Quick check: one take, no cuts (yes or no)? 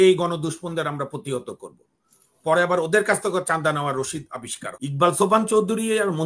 no